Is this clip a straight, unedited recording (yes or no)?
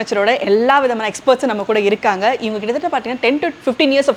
yes